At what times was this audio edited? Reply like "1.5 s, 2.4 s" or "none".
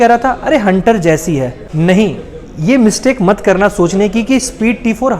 1.6 s